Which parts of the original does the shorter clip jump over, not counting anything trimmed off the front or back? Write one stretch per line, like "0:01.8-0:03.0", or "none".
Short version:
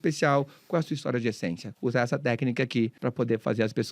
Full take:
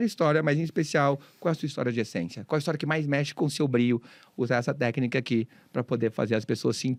0:02.4-0:04.2
0:05.5-0:05.7